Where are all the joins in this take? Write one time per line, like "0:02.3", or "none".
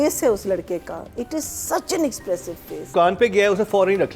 0:02.9